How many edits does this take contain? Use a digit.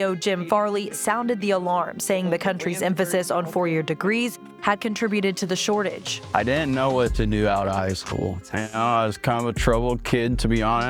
0